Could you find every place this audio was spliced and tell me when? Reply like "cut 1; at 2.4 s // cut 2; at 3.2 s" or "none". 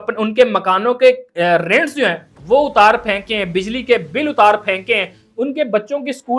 none